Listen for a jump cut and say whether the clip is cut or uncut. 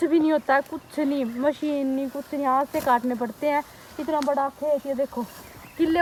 uncut